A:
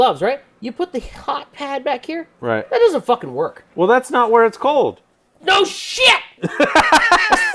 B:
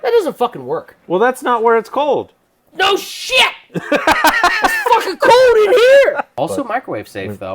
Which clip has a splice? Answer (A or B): B